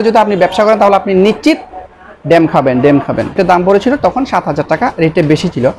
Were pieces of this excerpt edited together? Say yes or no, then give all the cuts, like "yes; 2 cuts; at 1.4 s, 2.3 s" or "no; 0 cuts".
yes; 1 cut; at 3.3 s